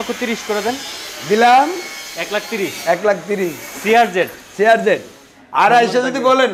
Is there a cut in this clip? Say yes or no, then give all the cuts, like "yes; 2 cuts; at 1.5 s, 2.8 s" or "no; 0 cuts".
yes; 1 cut; at 4.9 s